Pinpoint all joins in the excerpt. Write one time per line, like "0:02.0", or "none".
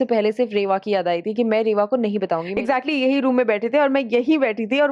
0:02.5